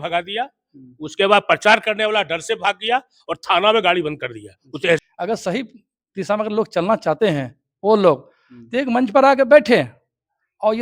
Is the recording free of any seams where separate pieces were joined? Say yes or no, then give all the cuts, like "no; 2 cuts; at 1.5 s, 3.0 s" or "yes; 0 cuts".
no; 1 cut; at 5.0 s